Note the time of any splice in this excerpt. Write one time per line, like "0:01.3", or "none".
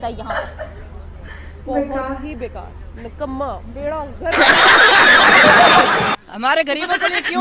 0:06.1